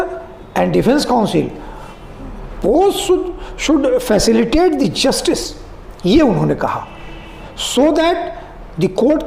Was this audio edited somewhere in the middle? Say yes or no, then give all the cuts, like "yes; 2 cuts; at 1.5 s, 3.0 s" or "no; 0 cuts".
no; 0 cuts